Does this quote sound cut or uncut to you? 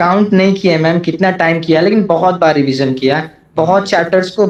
uncut